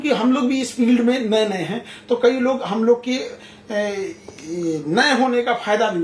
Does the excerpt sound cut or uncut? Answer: uncut